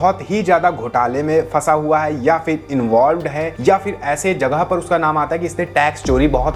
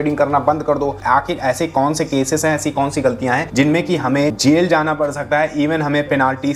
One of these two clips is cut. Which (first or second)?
second